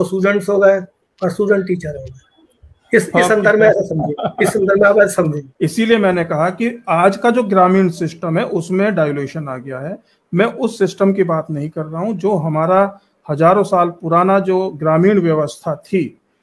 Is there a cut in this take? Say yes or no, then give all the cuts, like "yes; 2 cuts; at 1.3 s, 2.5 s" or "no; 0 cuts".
yes; 1 cut; at 5.4 s